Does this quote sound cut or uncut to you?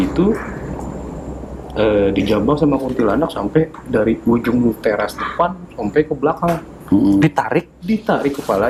uncut